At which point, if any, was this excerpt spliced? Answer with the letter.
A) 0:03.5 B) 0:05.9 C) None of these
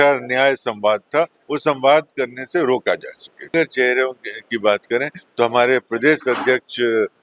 A